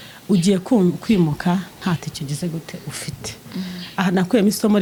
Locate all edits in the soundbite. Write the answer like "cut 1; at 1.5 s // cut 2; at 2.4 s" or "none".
none